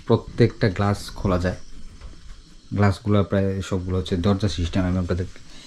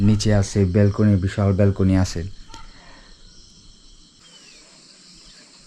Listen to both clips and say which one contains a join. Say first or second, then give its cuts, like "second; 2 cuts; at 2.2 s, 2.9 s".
second; 1 cut; at 4.2 s